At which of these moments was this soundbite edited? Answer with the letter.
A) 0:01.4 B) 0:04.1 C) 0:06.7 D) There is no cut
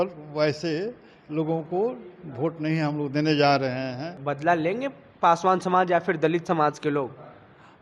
B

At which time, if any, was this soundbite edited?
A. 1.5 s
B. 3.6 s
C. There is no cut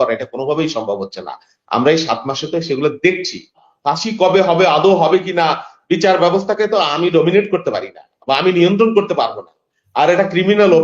B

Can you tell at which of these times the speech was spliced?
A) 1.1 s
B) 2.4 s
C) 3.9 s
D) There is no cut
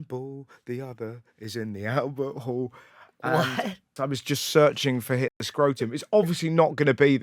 C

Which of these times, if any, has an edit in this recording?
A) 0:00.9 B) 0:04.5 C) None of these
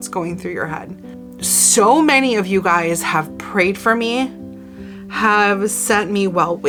C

